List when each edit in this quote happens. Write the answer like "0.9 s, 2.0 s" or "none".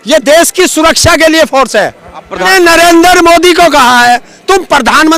2.4 s